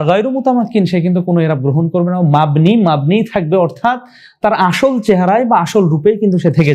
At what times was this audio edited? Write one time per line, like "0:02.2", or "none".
none